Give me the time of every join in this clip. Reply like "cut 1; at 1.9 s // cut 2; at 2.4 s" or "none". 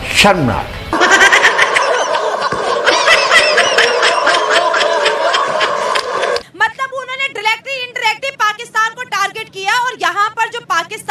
cut 1; at 6.4 s